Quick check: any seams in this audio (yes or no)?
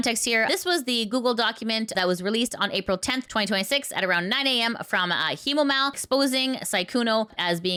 no